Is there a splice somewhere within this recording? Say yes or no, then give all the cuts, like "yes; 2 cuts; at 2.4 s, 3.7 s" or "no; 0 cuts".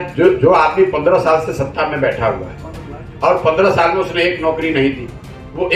no; 0 cuts